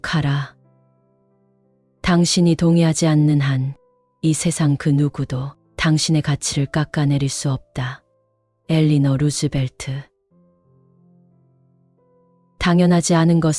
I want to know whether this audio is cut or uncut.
cut